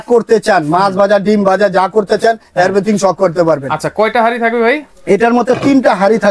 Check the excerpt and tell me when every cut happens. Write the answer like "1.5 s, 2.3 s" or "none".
none

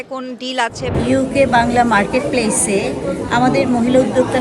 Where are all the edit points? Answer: 0.9 s

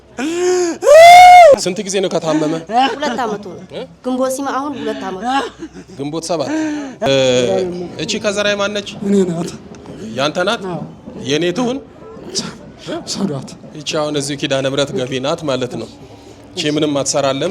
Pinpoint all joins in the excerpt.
1.5 s, 7.1 s

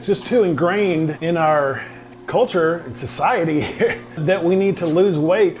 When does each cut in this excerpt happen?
1.2 s, 4.2 s

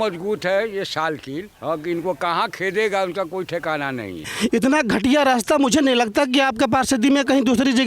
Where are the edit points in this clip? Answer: 1.5 s, 4.3 s

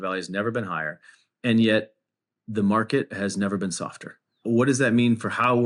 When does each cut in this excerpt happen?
4.3 s

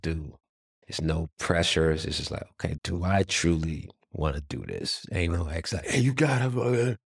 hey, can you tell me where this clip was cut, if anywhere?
4.0 s

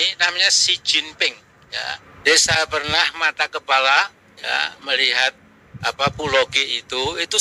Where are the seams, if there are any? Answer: 2.1 s

